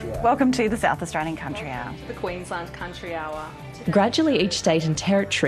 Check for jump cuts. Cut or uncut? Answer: uncut